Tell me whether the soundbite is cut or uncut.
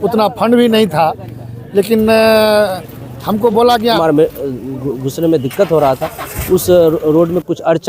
cut